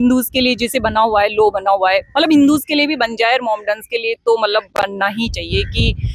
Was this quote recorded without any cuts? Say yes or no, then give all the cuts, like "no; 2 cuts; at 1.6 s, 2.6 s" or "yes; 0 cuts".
yes; 0 cuts